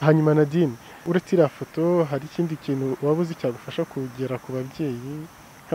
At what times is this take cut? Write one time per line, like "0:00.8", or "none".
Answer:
0:01.1